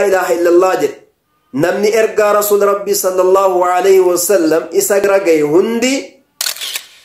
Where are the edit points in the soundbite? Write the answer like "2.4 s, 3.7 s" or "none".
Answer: 5.0 s